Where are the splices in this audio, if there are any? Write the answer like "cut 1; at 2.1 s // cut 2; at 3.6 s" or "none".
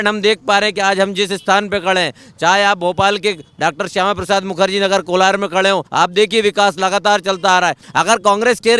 cut 1; at 5.9 s // cut 2; at 7.8 s